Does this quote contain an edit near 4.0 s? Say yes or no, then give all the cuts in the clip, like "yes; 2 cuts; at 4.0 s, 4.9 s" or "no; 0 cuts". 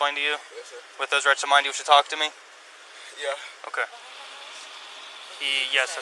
yes; 1 cut; at 4.0 s